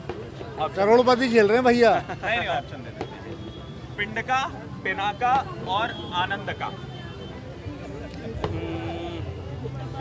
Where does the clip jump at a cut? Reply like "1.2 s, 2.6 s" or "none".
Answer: none

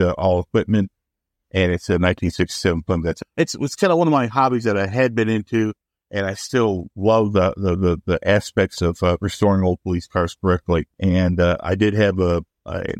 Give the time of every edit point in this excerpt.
3.2 s, 10.9 s

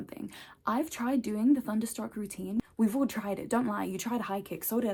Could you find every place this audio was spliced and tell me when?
none

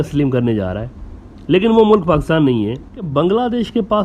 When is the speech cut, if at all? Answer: 3.1 s

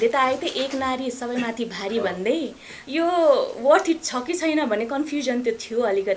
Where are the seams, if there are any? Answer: none

